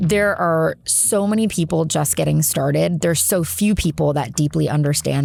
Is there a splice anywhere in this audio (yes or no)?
no